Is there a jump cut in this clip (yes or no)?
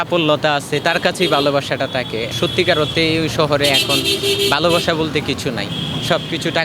yes